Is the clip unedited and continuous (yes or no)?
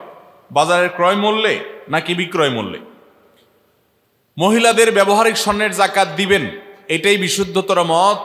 yes